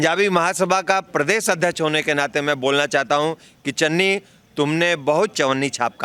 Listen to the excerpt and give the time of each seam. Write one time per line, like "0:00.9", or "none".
none